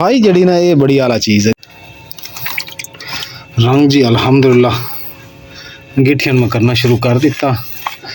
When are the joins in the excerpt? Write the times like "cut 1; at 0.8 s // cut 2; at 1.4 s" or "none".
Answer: cut 1; at 1.5 s